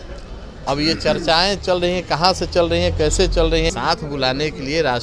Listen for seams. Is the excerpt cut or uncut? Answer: cut